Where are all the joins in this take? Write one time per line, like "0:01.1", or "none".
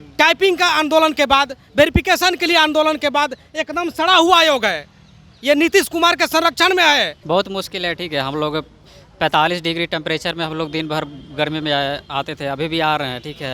0:07.2

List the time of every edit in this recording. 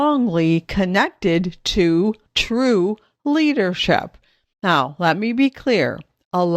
0:02.3

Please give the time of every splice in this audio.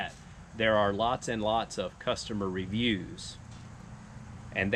none

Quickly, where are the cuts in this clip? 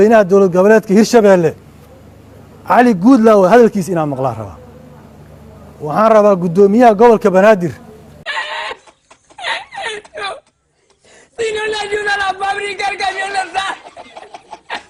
none

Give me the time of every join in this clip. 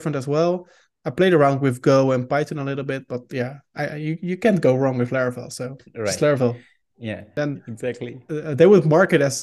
0:07.3

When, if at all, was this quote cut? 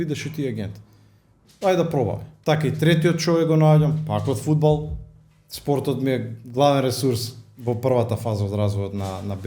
0:02.3

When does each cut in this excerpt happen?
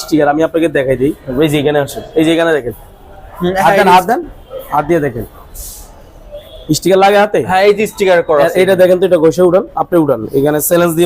0:01.3

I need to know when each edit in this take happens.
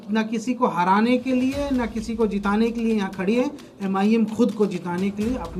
none

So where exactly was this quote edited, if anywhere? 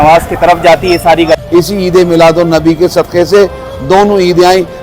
0:01.4

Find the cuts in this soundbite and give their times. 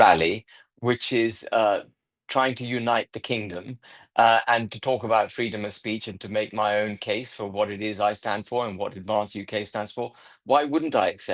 none

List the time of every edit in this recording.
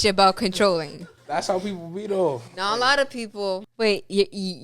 0:03.6

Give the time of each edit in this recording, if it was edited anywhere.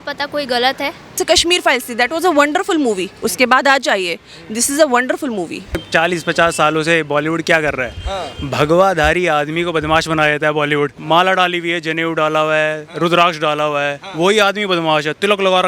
0:01.2
0:05.8
0:11.0

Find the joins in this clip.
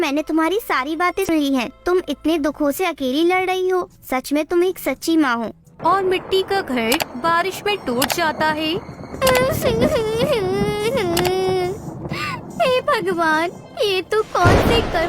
0:01.3
0:05.7

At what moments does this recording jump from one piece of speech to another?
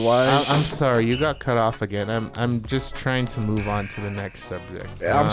none

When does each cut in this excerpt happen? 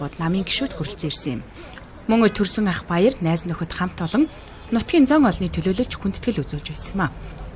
0:04.0

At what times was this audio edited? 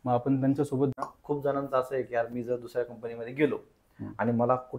0:00.9

